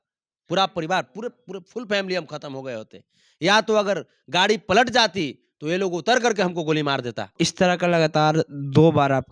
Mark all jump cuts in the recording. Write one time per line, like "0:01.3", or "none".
0:07.3

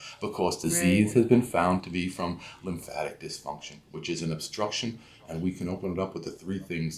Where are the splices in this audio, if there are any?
none

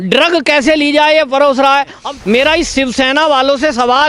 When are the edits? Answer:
0:02.0

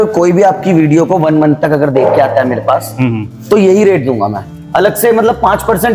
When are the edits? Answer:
none

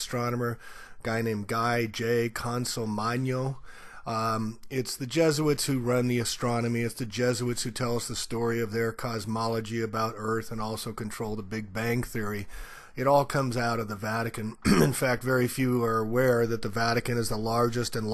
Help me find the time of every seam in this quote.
0:14.4

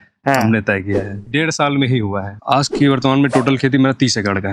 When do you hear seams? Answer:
0:01.2
0:02.4

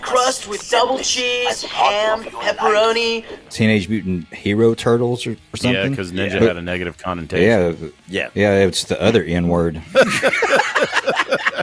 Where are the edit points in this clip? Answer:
0:03.5
0:09.9

